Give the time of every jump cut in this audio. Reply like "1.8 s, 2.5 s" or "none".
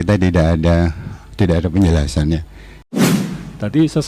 3.0 s